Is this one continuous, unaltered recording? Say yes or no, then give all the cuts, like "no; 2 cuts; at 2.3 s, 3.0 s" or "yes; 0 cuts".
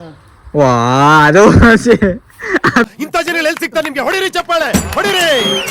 yes; 0 cuts